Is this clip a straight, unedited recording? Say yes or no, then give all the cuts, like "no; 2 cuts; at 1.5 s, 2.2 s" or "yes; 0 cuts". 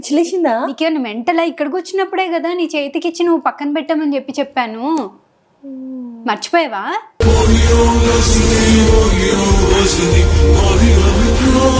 yes; 0 cuts